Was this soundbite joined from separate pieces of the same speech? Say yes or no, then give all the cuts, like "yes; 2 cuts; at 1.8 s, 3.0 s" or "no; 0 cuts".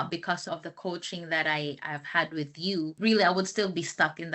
no; 0 cuts